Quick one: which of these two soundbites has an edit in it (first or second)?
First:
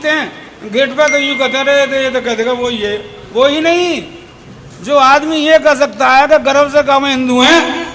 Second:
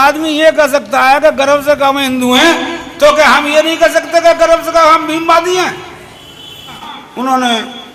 second